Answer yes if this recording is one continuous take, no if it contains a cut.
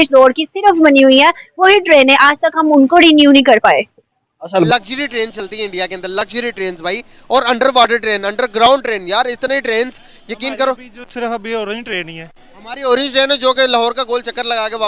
no